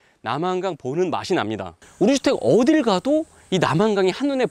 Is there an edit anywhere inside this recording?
yes; 1 cut; at 1.7 s

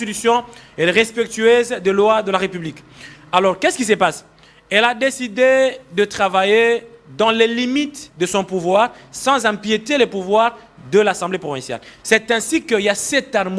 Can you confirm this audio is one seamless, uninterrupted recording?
yes; 0 cuts

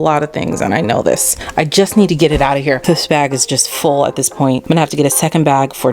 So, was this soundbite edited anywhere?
yes; 3 cuts; at 1.4 s, 2.8 s, 4.6 s

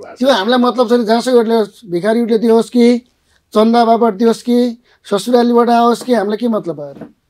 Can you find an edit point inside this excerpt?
no; 0 cuts

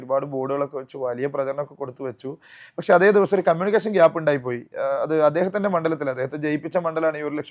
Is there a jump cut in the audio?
no; 0 cuts

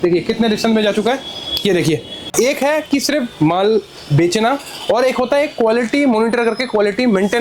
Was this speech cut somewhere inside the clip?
yes; 1 cut; at 2.3 s

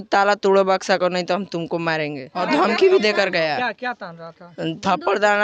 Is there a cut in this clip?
yes; 1 cut; at 2.4 s

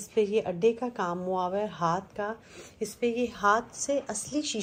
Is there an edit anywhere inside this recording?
no; 0 cuts

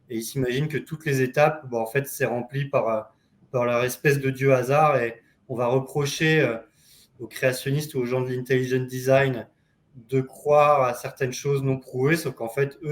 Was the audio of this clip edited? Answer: no; 0 cuts

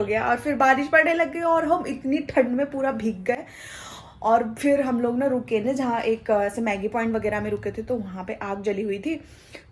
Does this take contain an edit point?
no; 0 cuts

